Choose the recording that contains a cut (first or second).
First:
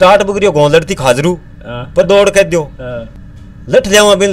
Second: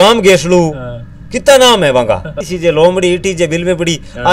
second